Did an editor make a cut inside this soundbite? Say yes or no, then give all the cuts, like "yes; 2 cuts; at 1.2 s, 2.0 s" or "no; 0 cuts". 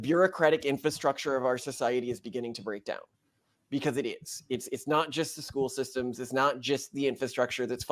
no; 0 cuts